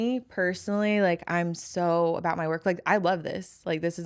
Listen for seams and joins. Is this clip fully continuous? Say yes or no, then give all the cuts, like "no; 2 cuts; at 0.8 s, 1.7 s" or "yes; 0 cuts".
yes; 0 cuts